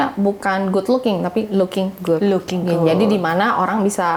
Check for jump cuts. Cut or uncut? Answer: uncut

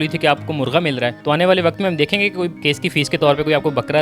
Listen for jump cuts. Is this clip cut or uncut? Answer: uncut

